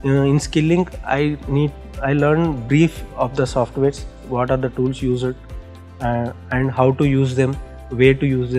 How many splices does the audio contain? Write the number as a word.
zero